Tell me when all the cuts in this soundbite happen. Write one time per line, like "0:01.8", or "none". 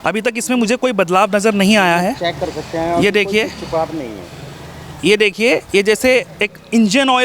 none